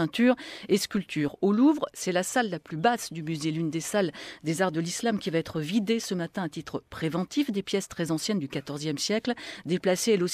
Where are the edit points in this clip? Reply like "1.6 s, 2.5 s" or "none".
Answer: 1.9 s